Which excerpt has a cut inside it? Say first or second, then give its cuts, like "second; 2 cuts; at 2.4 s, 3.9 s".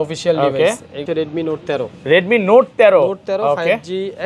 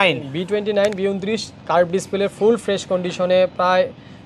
first; 1 cut; at 1.1 s